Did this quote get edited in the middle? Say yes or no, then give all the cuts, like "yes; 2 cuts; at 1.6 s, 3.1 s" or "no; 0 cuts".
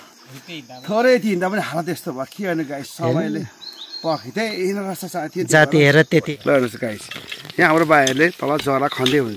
yes; 1 cut; at 6.3 s